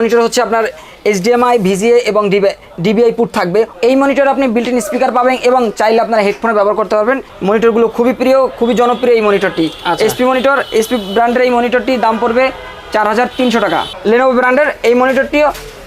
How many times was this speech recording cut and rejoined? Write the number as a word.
three